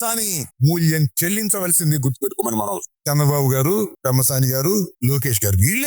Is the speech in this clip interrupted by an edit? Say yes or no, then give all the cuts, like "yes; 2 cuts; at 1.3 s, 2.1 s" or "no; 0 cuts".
yes; 1 cut; at 2.9 s